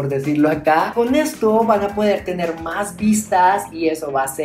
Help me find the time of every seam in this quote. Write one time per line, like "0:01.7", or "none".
0:00.9